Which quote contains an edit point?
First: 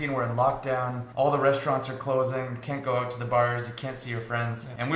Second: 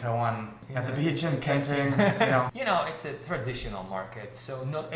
second; 1 cut; at 2.5 s

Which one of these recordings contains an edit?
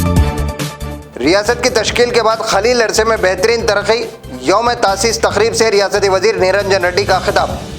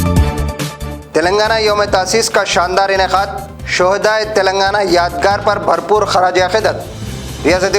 first; 1 cut; at 0.9 s

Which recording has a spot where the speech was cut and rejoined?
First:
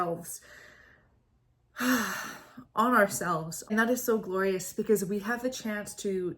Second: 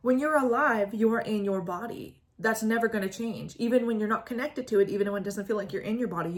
first; 1 cut; at 3.7 s

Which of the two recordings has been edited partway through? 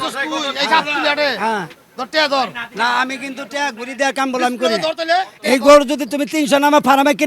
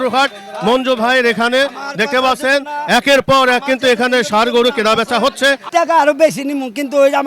second; 1 cut; at 5.6 s

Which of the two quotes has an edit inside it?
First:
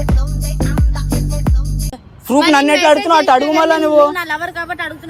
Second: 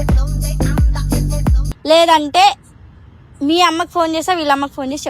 second; 1 cut; at 1.7 s

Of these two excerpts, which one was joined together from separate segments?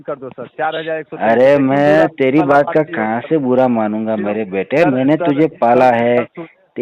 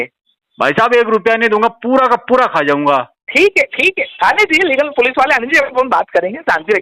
second; 1 cut; at 3.2 s

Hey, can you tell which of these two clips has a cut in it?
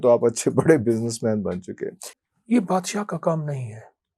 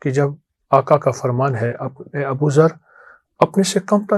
first; 1 cut; at 2.1 s

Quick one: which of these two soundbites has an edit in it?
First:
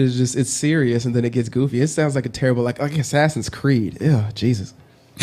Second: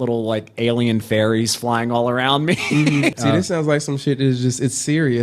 second; 1 cut; at 3.1 s

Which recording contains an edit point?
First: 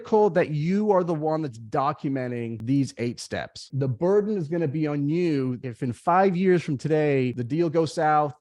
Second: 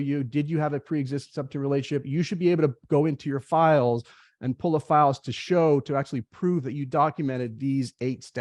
first; 4 cuts; at 2.6 s, 3.7 s, 5.6 s, 7.4 s

